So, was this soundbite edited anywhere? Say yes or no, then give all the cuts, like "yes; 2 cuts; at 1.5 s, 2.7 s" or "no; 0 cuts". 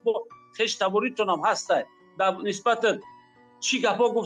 no; 0 cuts